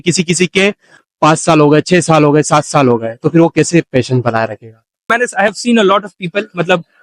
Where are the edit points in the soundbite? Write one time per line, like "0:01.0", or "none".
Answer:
0:05.1